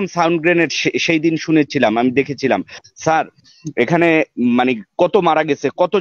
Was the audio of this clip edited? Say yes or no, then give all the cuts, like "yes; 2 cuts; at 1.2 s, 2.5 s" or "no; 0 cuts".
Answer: no; 0 cuts